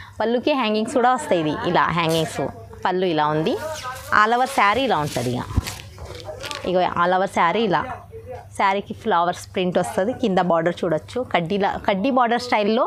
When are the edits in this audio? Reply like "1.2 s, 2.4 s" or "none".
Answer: none